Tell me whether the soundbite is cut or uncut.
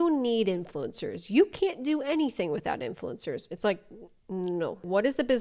uncut